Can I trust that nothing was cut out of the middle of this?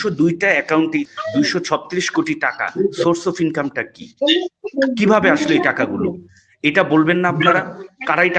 no; 1 cut; at 1.1 s

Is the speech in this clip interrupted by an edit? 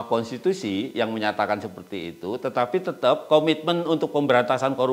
no; 0 cuts

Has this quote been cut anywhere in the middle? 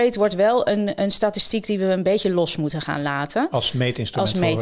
no; 0 cuts

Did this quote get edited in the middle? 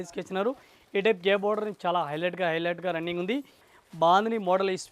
yes; 1 cut; at 3.7 s

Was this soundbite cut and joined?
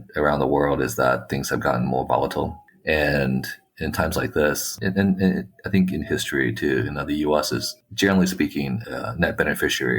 yes; 2 cuts; at 4.7 s, 8.8 s

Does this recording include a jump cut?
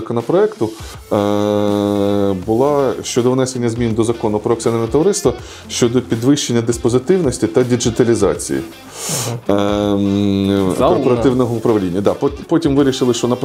no; 0 cuts

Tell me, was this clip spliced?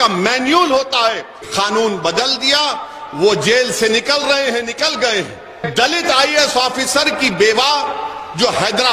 yes; 2 cuts; at 1.4 s, 5.7 s

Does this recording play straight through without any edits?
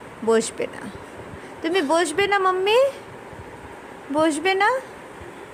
yes; 0 cuts

